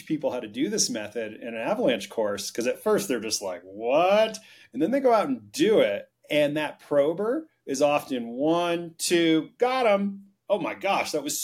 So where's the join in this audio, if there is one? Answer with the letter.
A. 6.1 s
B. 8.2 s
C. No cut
A